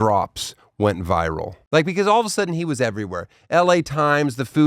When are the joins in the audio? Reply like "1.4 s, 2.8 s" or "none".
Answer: 1.5 s